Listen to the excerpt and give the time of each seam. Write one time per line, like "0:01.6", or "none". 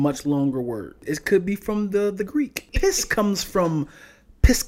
0:01.0
0:02.6